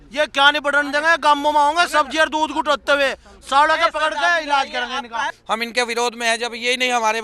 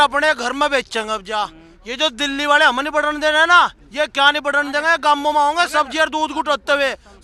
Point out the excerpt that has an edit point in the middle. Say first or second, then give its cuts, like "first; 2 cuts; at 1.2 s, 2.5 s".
first; 1 cut; at 5.4 s